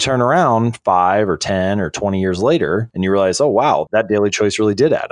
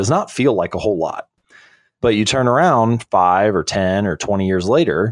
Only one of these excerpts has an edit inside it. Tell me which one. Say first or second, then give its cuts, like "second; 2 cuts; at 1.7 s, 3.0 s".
second; 1 cut; at 1.3 s